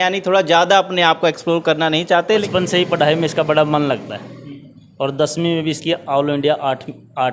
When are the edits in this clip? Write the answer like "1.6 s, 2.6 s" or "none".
2.5 s